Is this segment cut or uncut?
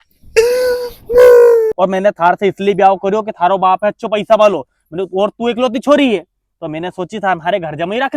cut